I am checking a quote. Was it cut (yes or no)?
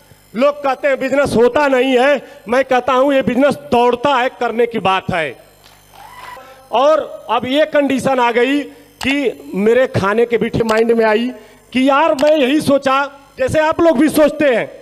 yes